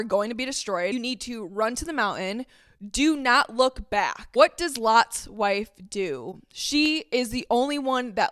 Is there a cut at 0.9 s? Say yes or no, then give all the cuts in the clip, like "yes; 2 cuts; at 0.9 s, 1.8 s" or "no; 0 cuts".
yes; 1 cut; at 0.9 s